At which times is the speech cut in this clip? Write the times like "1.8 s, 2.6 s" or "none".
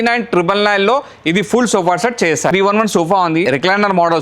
2.5 s, 3.4 s